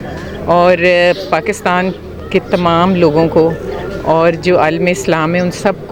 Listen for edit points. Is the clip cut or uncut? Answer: uncut